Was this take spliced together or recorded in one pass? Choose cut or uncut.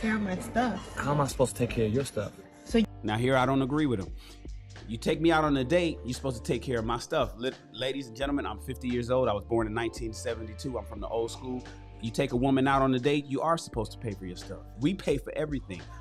uncut